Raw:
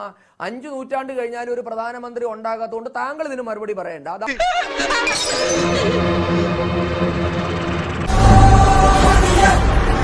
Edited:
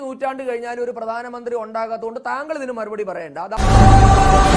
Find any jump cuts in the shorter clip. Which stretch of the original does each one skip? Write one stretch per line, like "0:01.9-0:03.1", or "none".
0:04.3-0:08.1